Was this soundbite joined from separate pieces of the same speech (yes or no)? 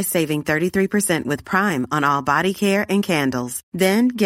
no